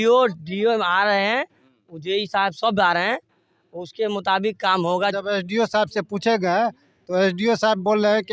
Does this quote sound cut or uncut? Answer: cut